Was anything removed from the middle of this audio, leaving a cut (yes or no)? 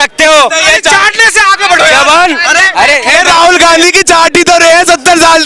no